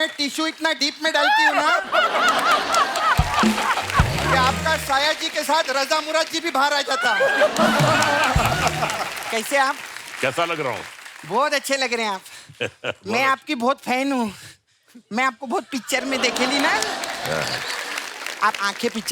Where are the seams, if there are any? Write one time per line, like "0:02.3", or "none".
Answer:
0:09.1